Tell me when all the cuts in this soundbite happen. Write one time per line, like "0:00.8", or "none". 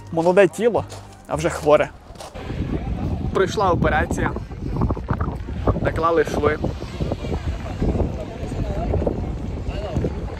0:02.4